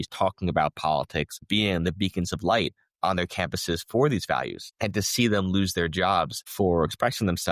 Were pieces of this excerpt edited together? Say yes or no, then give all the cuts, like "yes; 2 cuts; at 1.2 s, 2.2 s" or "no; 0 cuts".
yes; 3 cuts; at 1.4 s, 4.6 s, 6.4 s